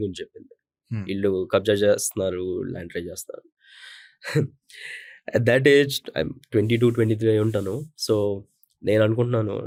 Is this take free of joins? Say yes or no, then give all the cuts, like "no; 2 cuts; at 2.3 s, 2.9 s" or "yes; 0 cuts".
yes; 0 cuts